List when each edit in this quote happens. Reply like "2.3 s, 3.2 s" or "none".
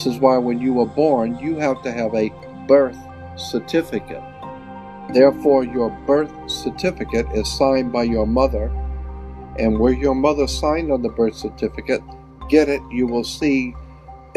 4.6 s

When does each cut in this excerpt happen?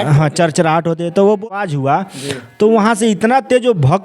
1.5 s

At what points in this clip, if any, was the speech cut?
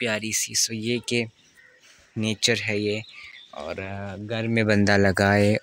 none

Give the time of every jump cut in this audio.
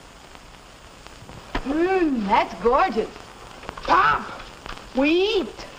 4.9 s

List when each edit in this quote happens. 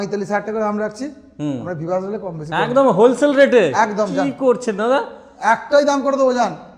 none

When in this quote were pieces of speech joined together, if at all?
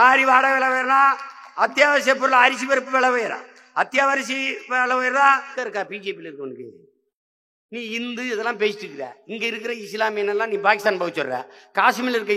5.5 s

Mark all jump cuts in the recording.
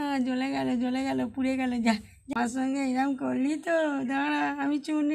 2.3 s

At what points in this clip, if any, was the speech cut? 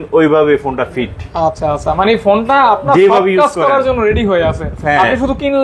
none

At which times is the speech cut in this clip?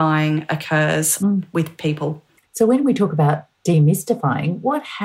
none

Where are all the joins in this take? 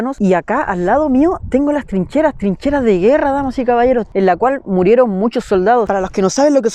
4.1 s, 5.9 s

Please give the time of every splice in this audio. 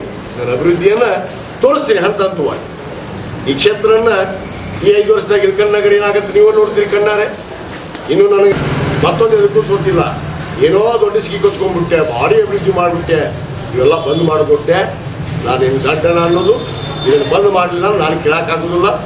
8.5 s

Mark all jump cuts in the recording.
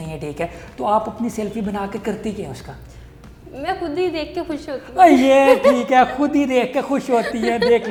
none

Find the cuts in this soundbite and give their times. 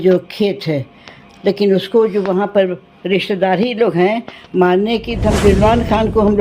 5.3 s

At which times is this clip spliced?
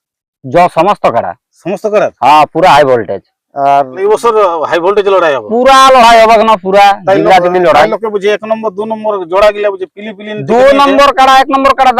4.0 s

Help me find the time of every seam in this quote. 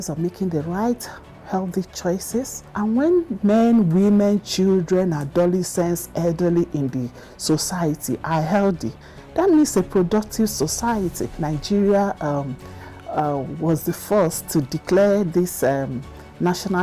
2.6 s, 11.4 s

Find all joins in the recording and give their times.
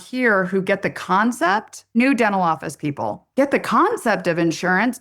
1.8 s

